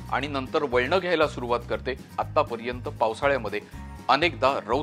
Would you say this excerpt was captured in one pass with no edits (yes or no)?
no